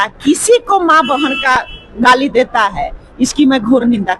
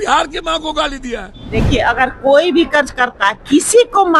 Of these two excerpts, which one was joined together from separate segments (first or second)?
second